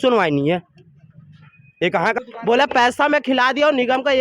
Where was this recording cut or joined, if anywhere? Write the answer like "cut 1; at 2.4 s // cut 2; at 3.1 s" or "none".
cut 1; at 2.1 s